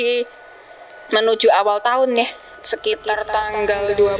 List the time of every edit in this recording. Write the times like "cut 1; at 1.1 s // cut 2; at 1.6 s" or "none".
none